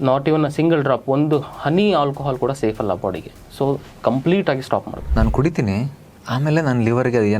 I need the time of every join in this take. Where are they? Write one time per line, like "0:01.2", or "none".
0:05.0